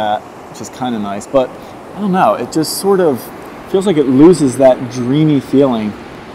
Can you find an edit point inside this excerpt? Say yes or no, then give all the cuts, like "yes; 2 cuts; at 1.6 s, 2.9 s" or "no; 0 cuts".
no; 0 cuts